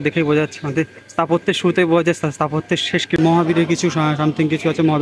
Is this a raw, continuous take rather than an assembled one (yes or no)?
no